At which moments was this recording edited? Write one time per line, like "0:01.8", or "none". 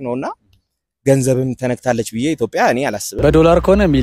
0:03.1